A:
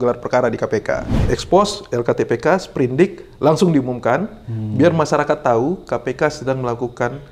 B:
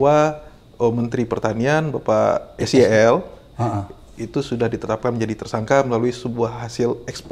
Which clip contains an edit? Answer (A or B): A